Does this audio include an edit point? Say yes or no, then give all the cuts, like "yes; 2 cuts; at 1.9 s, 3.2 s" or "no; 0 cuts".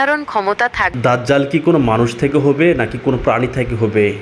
yes; 1 cut; at 0.9 s